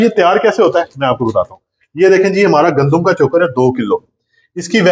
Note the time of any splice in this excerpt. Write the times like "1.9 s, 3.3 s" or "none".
none